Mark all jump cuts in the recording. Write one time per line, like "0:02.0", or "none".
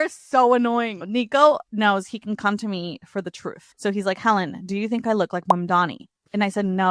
0:01.0
0:01.7
0:03.6